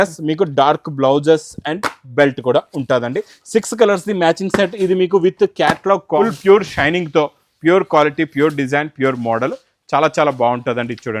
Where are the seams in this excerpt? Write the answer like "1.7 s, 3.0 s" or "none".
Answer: 6.2 s

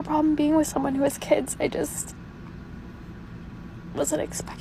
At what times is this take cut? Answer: none

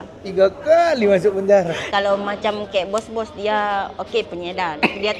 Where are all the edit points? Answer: 1.8 s

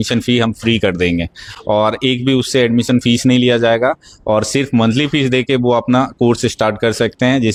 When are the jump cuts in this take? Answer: none

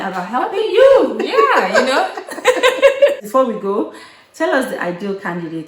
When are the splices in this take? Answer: 3.2 s

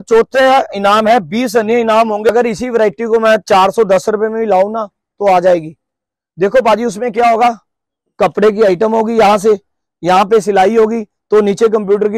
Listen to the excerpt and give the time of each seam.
2.3 s

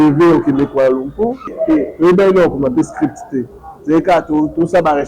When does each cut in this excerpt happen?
1.5 s

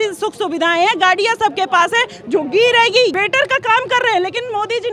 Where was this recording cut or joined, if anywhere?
3.1 s

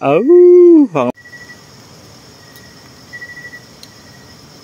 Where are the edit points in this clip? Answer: 1.1 s

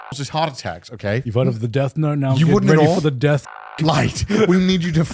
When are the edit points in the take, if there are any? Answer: 1.2 s, 3.5 s

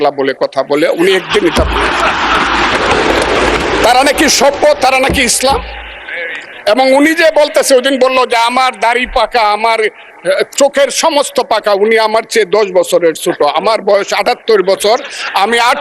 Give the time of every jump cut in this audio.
none

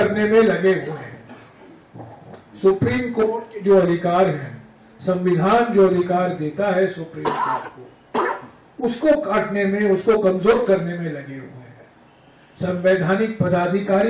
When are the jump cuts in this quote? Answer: none

